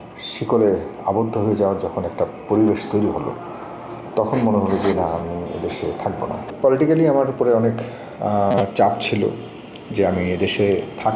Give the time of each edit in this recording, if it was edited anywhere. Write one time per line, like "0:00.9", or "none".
0:06.5